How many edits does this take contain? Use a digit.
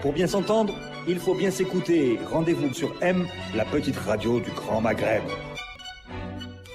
1